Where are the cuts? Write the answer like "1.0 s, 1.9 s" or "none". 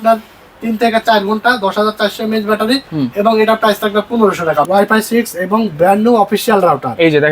4.7 s